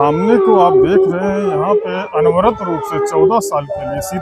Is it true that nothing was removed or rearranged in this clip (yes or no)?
yes